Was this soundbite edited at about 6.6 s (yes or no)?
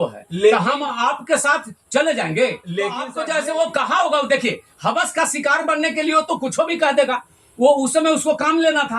no